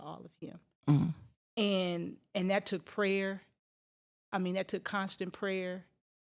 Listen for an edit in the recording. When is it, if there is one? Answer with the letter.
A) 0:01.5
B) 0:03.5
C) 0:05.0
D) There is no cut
D